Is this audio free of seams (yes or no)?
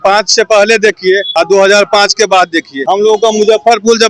no